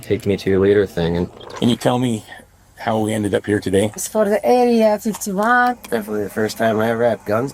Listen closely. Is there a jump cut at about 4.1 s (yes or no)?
yes